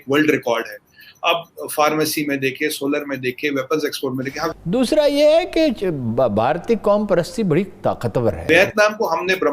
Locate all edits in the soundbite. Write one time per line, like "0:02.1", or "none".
0:04.5
0:08.4